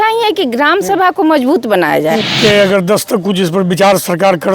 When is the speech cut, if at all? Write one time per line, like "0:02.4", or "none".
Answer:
0:02.3